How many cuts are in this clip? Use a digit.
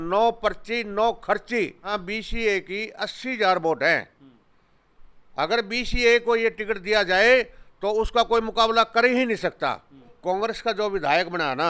2